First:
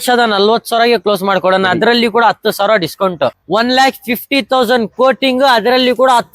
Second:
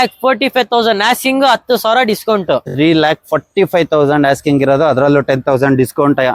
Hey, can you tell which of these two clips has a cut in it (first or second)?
first